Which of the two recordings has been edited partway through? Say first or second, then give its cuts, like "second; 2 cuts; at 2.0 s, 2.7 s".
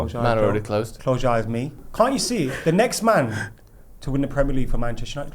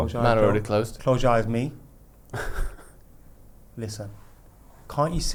first; 1 cut; at 1.8 s